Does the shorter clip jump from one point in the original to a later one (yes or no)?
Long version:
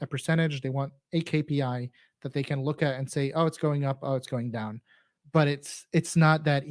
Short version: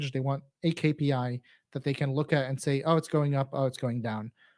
no